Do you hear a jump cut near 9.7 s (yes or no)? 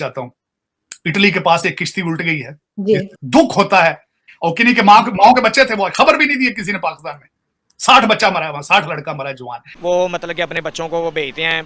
yes